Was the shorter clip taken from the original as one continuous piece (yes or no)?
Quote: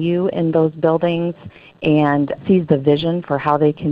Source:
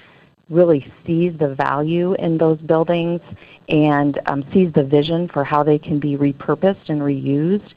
no